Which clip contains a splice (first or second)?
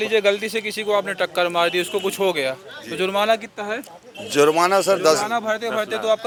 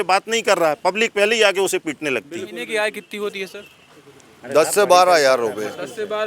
second